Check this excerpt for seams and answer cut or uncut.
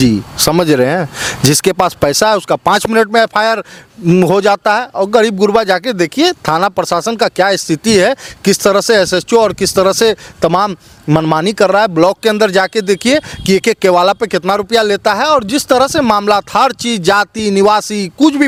uncut